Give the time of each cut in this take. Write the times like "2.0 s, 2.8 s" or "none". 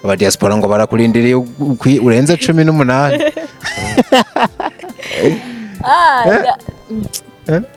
none